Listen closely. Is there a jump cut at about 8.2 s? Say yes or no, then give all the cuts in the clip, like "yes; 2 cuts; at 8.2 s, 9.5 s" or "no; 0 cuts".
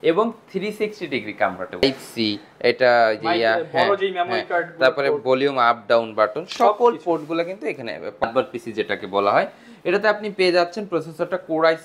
yes; 2 cuts; at 1.8 s, 8.2 s